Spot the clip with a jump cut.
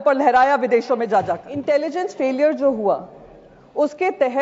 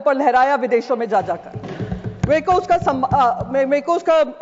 first; 1 cut; at 1.5 s

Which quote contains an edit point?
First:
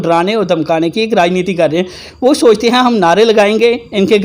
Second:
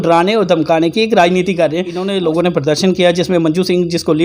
second; 1 cut; at 2.0 s

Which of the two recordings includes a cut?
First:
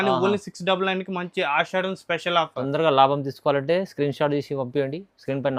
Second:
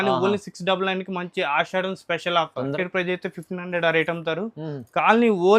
second; 1 cut; at 2.7 s

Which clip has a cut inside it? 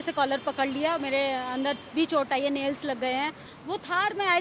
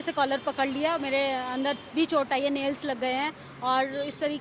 first; 1 cut; at 3.5 s

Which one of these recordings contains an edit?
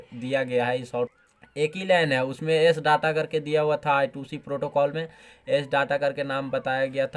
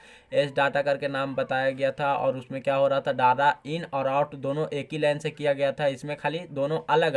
first; 1 cut; at 1.1 s

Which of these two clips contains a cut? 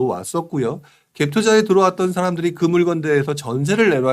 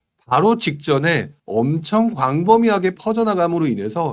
second; 2 cuts; at 1.3 s, 3.0 s

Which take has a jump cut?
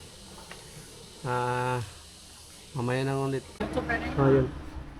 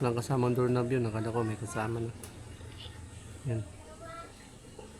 first; 1 cut; at 3.6 s

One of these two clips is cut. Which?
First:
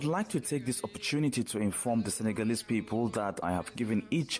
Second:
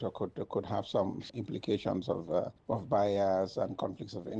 first; 1 cut; at 3.4 s

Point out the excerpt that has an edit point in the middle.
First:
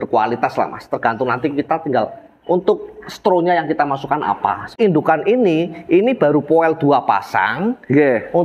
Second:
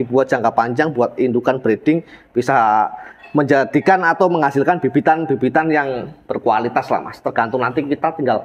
first; 1 cut; at 4.7 s

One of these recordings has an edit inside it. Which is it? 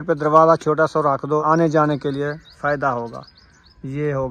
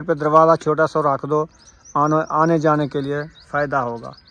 first; 1 cut; at 1.4 s

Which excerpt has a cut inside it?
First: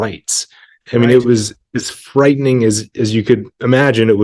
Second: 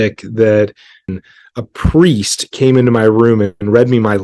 second; 1 cut; at 1.1 s

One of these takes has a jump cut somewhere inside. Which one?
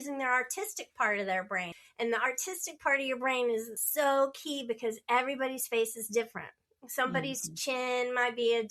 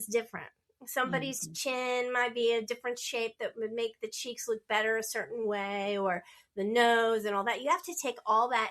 first; 2 cuts; at 1.7 s, 3.8 s

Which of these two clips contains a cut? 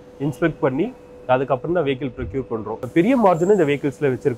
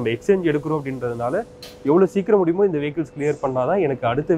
first; 1 cut; at 2.8 s

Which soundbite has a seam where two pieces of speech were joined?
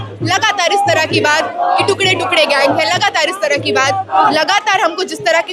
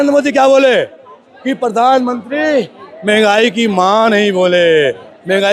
first; 1 cut; at 4.2 s

